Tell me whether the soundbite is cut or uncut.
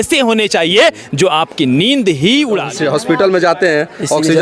cut